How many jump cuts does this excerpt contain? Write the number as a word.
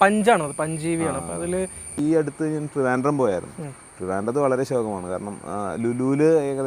one